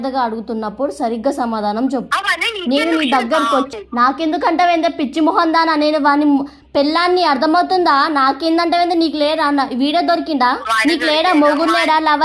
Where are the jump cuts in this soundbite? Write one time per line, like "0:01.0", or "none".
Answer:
0:02.1
0:03.7
0:10.7